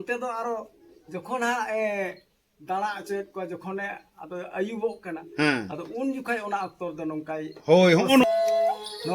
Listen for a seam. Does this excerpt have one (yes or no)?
yes